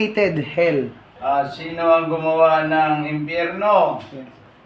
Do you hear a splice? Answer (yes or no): yes